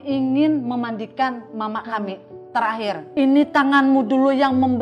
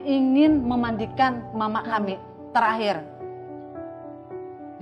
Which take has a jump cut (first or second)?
first